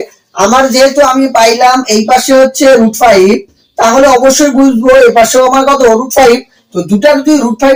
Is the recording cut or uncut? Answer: uncut